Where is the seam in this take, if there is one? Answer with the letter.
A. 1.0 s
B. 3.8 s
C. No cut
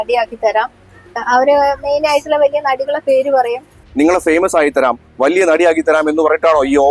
B